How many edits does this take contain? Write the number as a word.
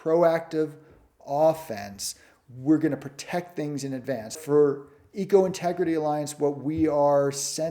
one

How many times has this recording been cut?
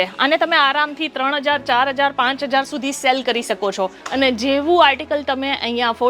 one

